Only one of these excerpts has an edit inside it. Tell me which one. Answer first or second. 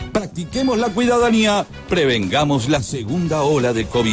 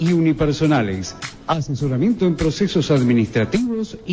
first